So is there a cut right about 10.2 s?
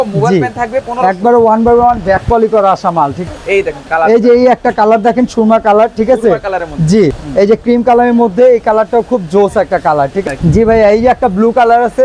yes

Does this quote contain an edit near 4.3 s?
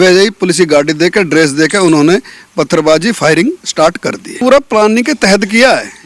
yes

